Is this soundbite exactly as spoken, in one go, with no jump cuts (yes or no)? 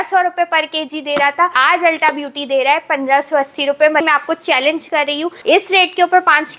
no